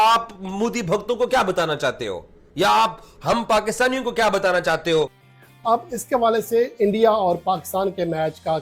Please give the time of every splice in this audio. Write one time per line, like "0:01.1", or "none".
0:05.3